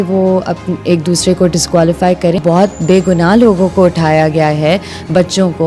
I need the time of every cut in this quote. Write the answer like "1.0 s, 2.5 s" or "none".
2.4 s